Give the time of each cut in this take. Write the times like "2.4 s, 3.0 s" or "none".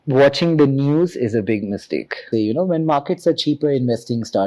2.2 s